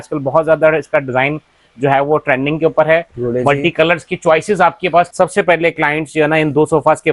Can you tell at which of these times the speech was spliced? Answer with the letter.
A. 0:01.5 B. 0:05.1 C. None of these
B